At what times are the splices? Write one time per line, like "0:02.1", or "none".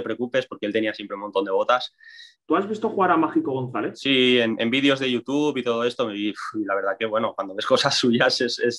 0:02.3
0:04.0